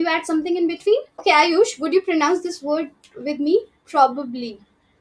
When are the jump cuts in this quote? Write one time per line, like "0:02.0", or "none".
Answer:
0:01.1